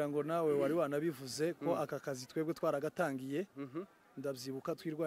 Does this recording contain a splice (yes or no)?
no